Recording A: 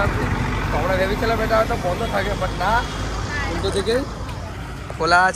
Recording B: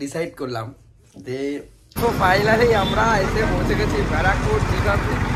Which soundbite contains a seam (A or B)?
B